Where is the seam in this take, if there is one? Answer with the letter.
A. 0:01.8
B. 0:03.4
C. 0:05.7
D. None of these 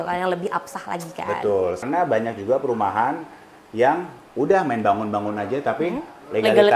A